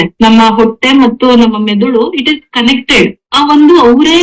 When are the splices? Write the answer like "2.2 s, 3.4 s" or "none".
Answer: 3.2 s